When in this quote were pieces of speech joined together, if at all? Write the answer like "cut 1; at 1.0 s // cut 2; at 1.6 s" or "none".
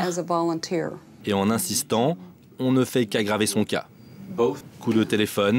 cut 1; at 1.1 s // cut 2; at 4.7 s